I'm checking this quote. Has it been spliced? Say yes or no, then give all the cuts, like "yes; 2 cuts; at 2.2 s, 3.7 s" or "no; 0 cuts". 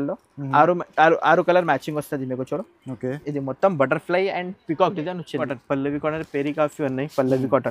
yes; 1 cut; at 5.4 s